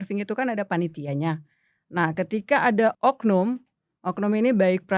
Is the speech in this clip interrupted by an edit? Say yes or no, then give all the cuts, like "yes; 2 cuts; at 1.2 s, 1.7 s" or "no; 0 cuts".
yes; 1 cut; at 2.9 s